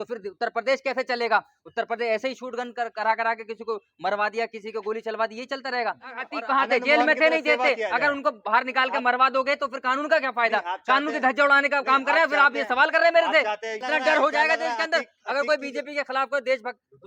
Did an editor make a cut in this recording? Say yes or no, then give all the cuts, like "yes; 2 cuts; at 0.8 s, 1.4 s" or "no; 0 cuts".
yes; 2 cuts; at 6.3 s, 13.8 s